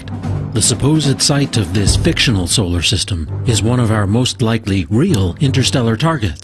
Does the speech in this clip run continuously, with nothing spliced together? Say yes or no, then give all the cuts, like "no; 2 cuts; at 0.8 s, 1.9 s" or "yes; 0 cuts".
no; 1 cut; at 1.2 s